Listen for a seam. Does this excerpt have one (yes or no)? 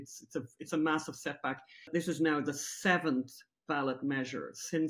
yes